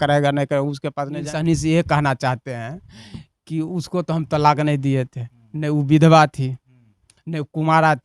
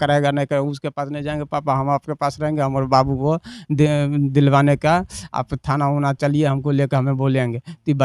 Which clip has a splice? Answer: first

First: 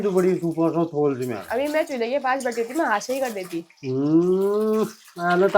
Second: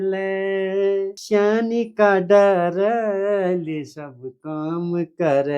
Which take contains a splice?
second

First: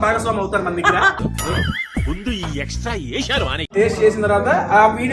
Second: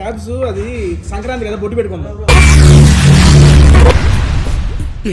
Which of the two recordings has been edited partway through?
first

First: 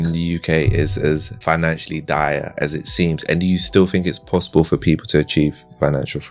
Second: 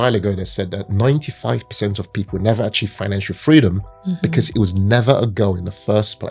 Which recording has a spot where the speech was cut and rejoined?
first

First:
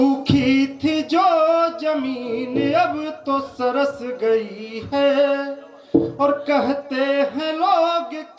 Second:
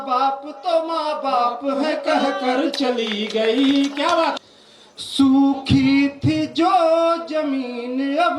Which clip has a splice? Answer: second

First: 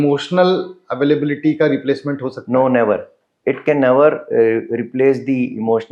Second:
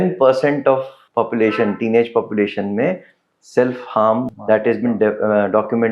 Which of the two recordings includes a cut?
second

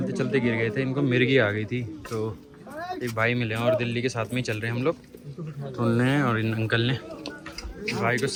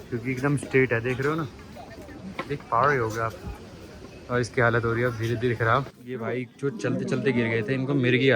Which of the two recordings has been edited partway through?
second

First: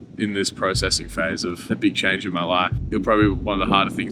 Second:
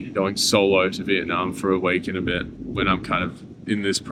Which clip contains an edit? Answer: first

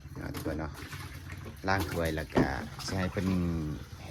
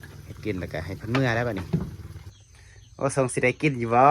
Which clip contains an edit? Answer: second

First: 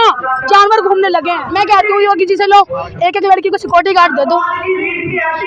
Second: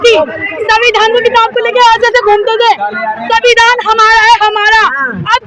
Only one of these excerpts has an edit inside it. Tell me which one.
first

